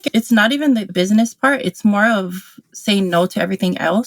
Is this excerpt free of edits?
no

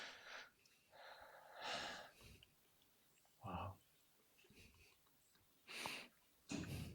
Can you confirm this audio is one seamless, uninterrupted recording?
yes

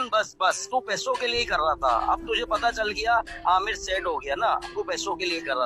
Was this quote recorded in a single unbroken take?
yes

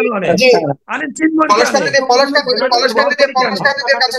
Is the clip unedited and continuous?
yes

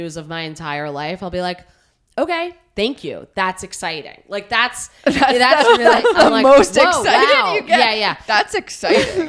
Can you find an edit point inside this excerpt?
no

